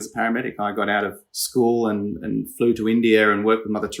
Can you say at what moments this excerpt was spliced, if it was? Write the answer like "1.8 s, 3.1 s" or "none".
none